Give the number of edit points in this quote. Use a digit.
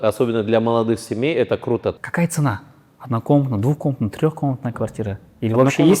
1